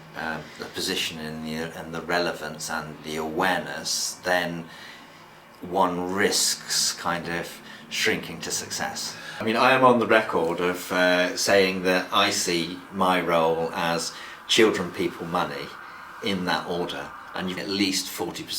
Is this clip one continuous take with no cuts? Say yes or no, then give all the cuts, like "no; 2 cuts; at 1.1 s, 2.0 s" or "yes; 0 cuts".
no; 2 cuts; at 9.4 s, 17.6 s